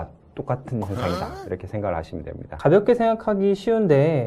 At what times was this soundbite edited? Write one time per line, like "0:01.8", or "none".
0:02.5